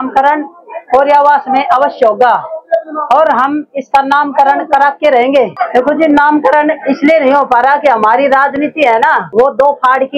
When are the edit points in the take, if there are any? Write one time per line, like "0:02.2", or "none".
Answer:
0:05.6
0:09.3